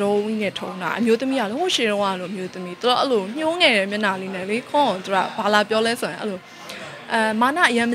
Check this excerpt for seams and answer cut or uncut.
uncut